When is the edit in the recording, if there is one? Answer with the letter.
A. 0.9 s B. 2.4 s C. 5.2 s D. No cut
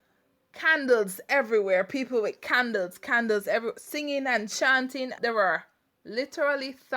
C